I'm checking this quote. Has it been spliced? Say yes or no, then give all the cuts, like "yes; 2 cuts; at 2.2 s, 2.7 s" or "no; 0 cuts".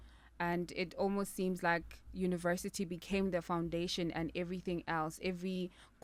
no; 0 cuts